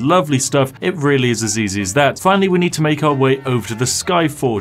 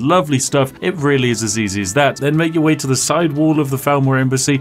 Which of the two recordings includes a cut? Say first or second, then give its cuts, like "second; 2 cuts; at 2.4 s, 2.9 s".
second; 1 cut; at 2.2 s